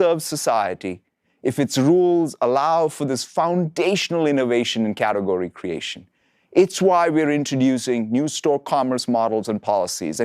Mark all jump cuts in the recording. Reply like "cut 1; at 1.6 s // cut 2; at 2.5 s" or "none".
cut 1; at 8.6 s